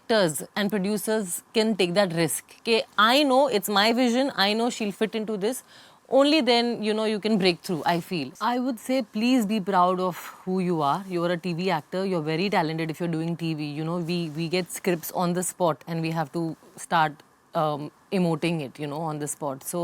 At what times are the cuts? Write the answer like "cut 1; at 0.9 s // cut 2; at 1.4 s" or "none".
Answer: cut 1; at 8.3 s